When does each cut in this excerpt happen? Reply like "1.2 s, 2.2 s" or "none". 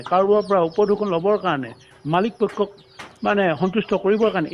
none